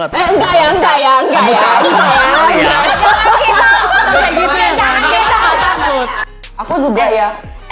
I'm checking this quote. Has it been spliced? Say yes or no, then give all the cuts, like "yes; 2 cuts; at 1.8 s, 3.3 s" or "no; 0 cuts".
yes; 1 cut; at 6.1 s